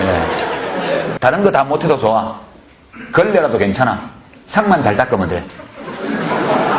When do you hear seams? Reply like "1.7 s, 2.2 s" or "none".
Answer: 1.1 s